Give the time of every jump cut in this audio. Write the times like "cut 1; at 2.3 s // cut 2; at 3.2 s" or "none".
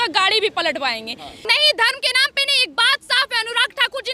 cut 1; at 1.4 s